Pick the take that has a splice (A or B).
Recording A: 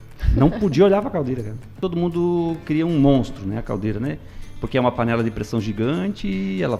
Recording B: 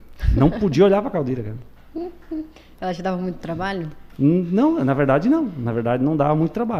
A